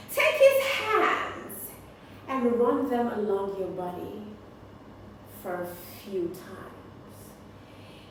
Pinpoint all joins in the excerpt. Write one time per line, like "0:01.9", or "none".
none